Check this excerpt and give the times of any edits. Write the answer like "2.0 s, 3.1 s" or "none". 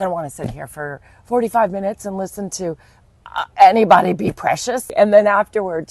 4.9 s